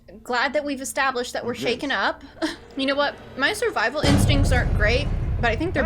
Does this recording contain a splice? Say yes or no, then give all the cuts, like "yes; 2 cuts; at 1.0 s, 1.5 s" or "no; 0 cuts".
yes; 1 cut; at 2.6 s